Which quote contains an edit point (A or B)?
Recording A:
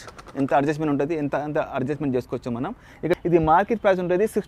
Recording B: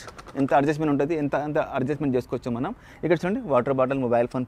A